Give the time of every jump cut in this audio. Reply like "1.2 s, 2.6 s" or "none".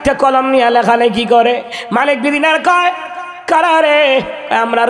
none